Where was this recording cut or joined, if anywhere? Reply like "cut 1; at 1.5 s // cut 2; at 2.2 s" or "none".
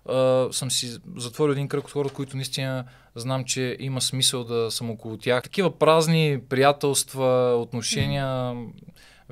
cut 1; at 5.5 s